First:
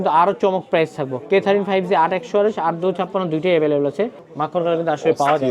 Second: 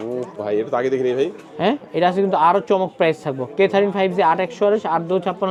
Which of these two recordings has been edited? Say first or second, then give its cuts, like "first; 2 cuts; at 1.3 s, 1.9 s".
first; 1 cut; at 4.2 s